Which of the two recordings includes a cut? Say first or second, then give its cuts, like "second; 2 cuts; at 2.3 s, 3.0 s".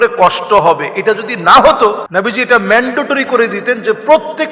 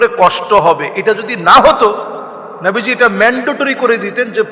first; 1 cut; at 2.0 s